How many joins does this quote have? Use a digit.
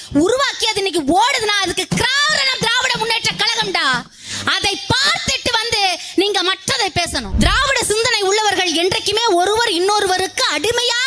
1